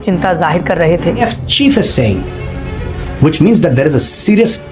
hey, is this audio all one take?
no; 1 cut; at 1.2 s

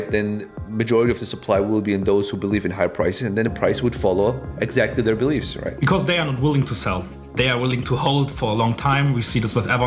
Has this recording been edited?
no; 0 cuts

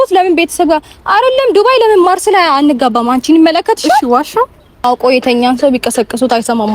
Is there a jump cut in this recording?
yes; 1 cut; at 4.8 s

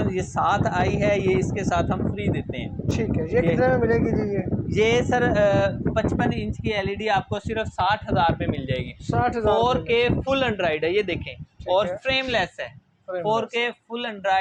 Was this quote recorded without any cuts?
yes; 0 cuts

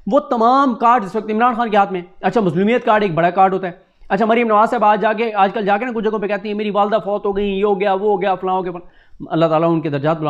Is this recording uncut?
yes; 0 cuts

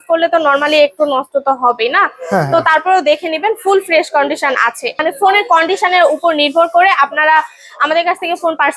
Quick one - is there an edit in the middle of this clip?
yes; 1 cut; at 5.1 s

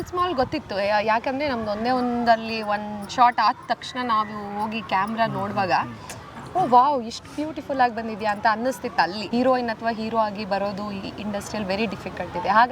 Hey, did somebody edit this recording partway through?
yes; 1 cut; at 9.2 s

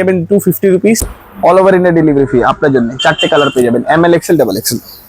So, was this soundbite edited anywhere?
yes; 1 cut; at 1.0 s

